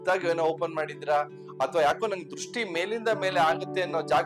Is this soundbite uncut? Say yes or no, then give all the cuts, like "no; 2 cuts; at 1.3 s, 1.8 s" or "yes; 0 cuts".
yes; 0 cuts